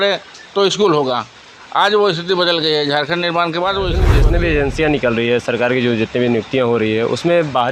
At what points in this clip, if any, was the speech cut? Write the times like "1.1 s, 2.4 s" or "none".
4.1 s

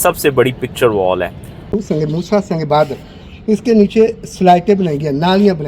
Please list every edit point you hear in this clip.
1.8 s

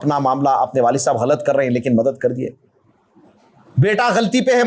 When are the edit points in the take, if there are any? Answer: none

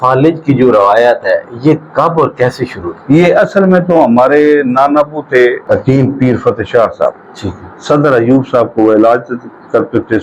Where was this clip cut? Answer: 5.6 s

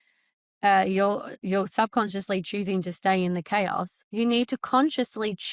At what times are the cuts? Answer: 4.0 s

